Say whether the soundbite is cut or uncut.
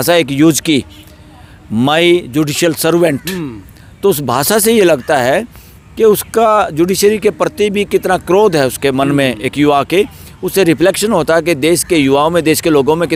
uncut